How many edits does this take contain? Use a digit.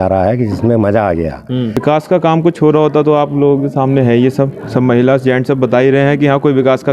1